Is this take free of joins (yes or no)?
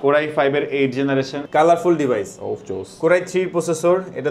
no